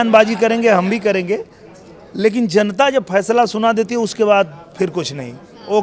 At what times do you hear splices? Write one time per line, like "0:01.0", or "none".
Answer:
none